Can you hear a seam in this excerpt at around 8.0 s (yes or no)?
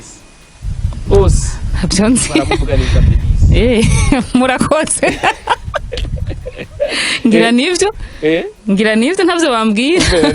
no